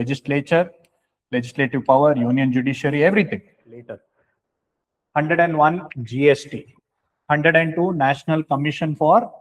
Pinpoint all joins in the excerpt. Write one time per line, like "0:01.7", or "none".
0:03.8